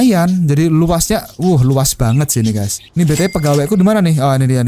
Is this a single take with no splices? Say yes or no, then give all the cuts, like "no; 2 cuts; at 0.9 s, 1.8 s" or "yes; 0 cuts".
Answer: no; 1 cut; at 2.8 s